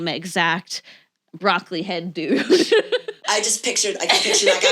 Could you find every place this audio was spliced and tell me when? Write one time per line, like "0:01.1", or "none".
0:03.2